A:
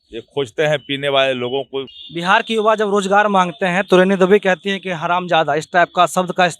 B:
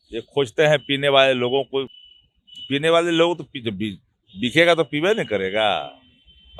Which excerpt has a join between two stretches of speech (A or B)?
A